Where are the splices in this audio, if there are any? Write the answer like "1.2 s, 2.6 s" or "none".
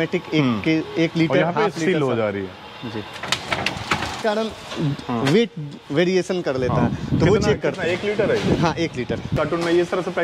4.2 s, 9.3 s